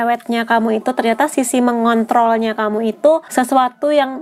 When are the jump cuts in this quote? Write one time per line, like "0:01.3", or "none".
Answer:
0:03.3